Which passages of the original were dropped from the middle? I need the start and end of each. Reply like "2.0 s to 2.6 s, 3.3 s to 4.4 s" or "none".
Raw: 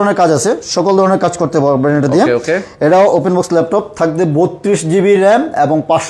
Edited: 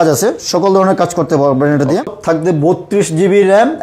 2.3 s to 3.8 s